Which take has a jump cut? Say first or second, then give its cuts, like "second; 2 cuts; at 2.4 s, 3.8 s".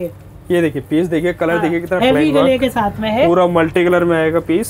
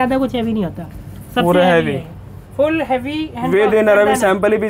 first; 1 cut; at 2.0 s